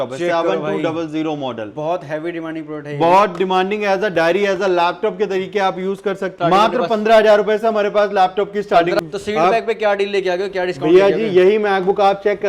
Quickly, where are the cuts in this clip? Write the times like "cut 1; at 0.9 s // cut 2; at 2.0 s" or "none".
cut 1; at 6.3 s // cut 2; at 9.0 s